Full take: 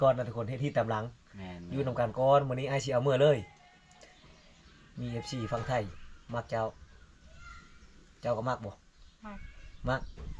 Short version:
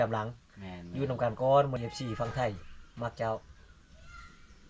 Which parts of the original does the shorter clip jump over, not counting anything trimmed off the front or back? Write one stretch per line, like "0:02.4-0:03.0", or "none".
0:02.5-0:05.1